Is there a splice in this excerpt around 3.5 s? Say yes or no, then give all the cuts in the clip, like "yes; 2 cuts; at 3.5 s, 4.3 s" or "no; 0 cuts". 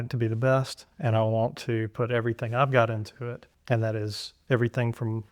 yes; 1 cut; at 3.5 s